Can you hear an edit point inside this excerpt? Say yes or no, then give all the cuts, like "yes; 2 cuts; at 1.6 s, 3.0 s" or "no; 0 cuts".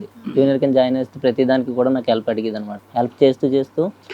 yes; 1 cut; at 2.7 s